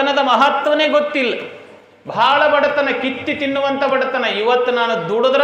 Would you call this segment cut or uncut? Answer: uncut